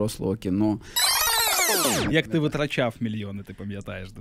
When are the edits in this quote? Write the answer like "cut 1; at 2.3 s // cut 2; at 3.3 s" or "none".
cut 1; at 1.4 s

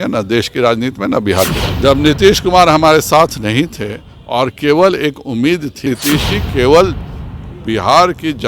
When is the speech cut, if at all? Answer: cut 1; at 1.6 s // cut 2; at 5.8 s

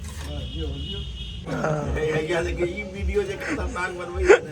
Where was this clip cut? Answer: cut 1; at 1.5 s

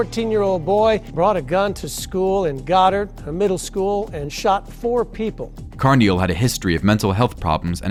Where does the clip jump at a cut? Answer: none

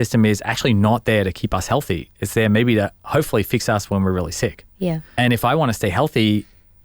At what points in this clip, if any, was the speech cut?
cut 1; at 5.1 s

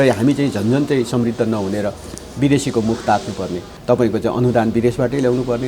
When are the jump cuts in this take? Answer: cut 1; at 3.7 s

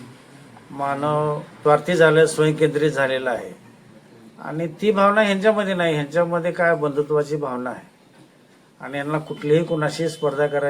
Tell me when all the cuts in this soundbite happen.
cut 1; at 1.5 s

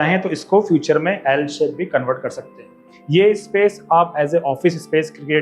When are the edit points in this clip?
cut 1; at 2.9 s

